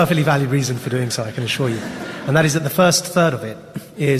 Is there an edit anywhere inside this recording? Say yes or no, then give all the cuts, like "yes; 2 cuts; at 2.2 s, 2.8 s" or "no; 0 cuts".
yes; 1 cut; at 2.7 s